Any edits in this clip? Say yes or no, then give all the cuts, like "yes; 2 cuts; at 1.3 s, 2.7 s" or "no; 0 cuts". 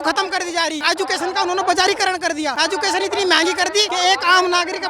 yes; 3 cuts; at 0.8 s, 2.5 s, 3.9 s